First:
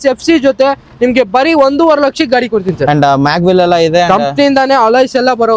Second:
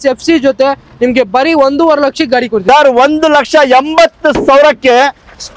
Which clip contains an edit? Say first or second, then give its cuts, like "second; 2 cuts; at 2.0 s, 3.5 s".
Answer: second; 1 cut; at 2.6 s